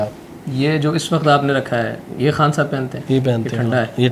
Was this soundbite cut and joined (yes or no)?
no